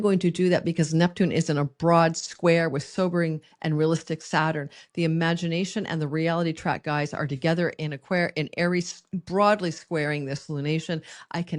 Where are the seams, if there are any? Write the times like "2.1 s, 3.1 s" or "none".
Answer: none